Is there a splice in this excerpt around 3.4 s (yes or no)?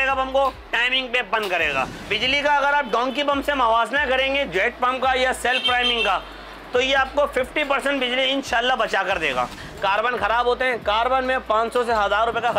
no